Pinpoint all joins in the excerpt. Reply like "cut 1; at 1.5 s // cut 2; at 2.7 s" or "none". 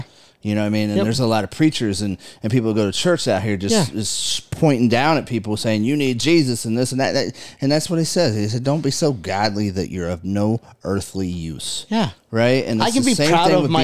none